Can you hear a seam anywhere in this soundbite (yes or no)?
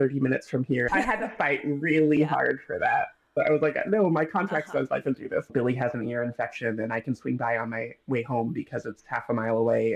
yes